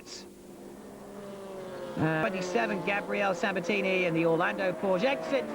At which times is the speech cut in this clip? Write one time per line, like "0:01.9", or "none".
0:02.2